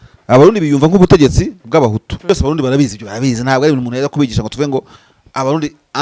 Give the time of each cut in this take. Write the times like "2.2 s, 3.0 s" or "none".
2.1 s

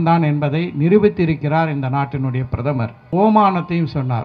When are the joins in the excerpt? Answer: 2.9 s

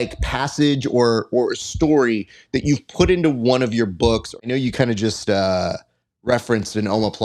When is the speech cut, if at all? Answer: 4.4 s

